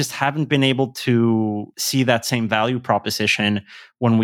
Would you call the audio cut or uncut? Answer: cut